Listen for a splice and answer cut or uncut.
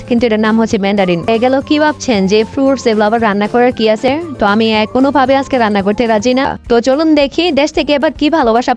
cut